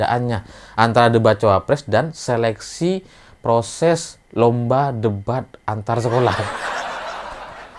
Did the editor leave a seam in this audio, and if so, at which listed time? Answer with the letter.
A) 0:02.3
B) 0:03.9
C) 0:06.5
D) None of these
C